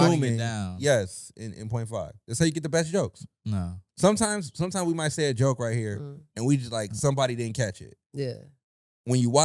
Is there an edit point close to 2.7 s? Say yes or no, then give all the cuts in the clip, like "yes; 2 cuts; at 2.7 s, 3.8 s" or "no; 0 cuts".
no; 0 cuts